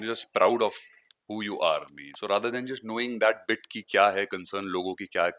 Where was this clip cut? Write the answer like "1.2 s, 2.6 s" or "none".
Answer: 2.0 s